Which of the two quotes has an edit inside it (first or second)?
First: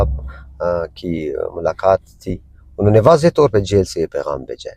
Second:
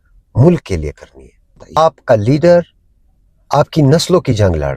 second